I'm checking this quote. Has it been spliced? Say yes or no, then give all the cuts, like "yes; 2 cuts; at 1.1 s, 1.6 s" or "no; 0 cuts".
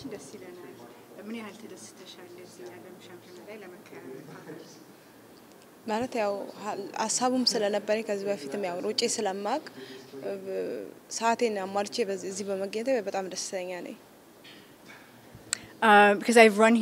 no; 0 cuts